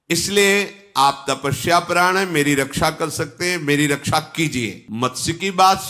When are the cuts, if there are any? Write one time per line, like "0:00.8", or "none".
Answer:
0:04.8